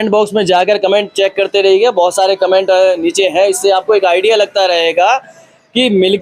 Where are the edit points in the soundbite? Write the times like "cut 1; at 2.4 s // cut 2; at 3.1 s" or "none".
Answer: none